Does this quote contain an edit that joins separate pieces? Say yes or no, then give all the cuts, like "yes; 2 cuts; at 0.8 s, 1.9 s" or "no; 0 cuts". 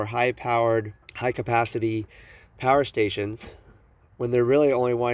yes; 1 cut; at 1.0 s